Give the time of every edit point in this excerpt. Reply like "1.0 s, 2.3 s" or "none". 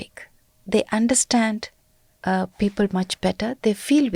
none